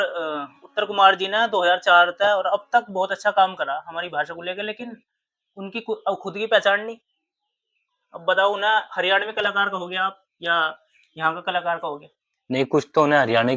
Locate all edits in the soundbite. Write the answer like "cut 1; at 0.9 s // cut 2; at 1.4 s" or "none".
none